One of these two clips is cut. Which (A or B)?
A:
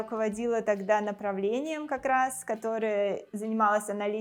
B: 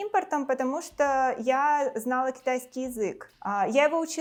A